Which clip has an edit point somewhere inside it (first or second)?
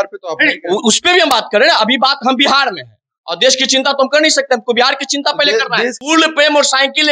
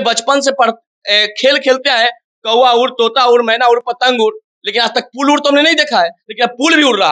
first